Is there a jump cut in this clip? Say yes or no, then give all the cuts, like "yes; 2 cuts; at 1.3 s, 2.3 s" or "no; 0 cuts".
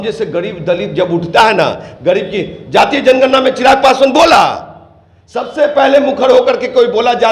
no; 0 cuts